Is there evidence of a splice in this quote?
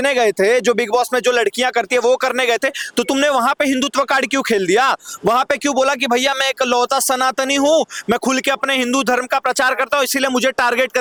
no; 0 cuts

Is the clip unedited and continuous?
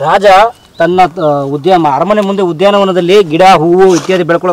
yes; 0 cuts

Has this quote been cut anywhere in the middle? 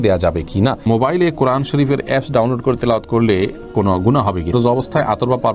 yes; 2 cuts; at 0.9 s, 4.5 s

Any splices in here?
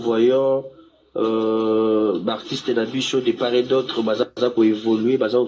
no; 0 cuts

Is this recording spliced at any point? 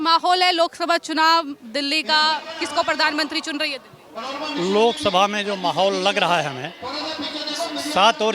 no; 0 cuts

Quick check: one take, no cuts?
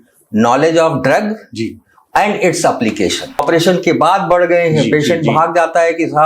no; 1 cut; at 3.4 s

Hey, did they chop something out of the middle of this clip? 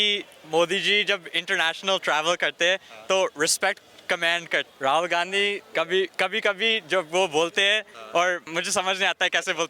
yes; 3 cuts; at 4.7 s, 5.6 s, 8.4 s

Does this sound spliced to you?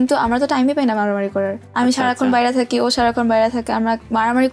yes; 1 cut; at 1.6 s

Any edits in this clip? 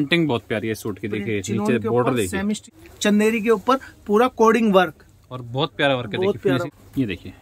yes; 2 cuts; at 2.7 s, 6.6 s

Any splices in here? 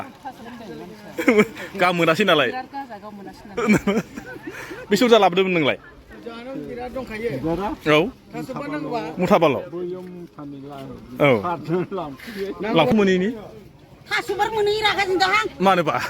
yes; 1 cut; at 12.9 s

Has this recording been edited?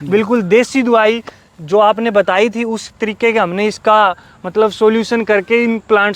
no; 0 cuts

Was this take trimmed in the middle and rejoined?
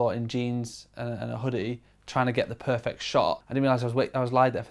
yes; 1 cut; at 3.4 s

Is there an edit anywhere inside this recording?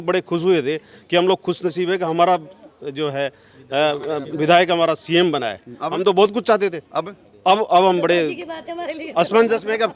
no; 0 cuts

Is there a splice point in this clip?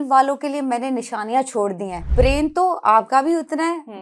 yes; 1 cut; at 2.0 s

